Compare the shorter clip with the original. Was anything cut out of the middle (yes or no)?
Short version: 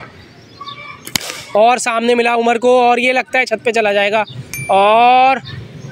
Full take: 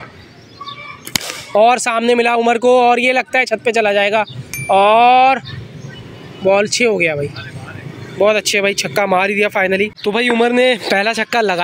no